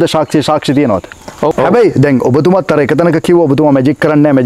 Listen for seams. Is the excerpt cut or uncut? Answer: cut